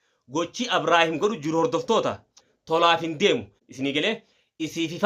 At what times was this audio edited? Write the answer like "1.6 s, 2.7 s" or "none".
3.6 s